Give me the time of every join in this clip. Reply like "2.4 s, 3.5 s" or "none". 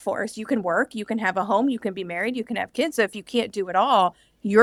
none